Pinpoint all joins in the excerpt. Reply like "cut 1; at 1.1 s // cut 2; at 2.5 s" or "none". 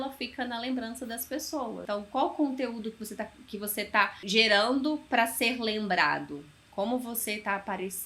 cut 1; at 1.8 s // cut 2; at 4.2 s